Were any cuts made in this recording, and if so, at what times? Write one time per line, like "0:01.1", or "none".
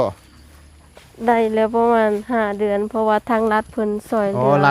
none